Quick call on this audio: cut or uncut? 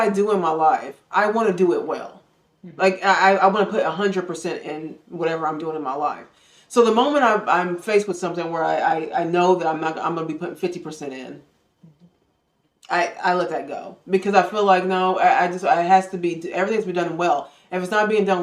uncut